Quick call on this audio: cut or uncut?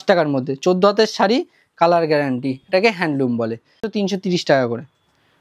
cut